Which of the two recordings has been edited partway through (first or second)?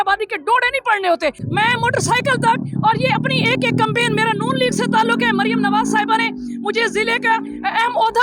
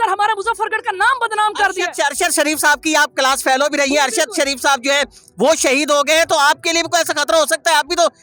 first